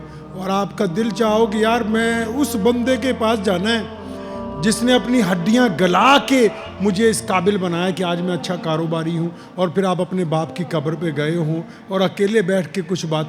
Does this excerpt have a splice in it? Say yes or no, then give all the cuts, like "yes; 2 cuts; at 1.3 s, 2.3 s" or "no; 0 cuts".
no; 0 cuts